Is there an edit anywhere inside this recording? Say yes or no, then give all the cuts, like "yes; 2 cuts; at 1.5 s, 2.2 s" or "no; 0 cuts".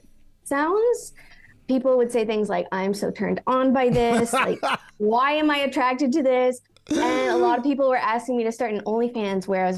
no; 0 cuts